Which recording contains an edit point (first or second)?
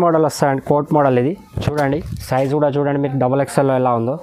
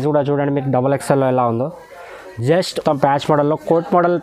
second